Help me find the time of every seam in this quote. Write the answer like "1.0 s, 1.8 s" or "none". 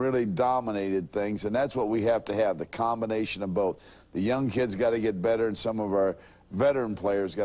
none